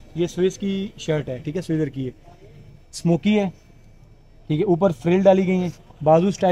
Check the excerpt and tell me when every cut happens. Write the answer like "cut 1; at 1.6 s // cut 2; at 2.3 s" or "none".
none